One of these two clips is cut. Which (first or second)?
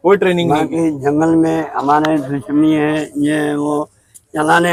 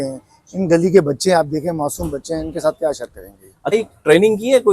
second